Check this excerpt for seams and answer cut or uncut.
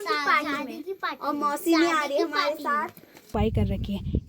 cut